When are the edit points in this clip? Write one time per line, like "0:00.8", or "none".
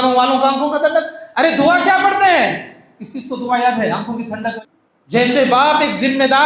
0:04.6